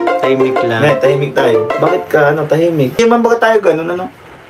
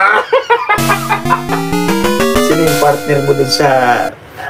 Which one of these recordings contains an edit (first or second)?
first